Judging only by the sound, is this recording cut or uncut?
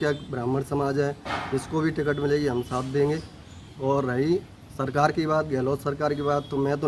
uncut